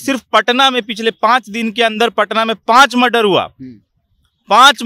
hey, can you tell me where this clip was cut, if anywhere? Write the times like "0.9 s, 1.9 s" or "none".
none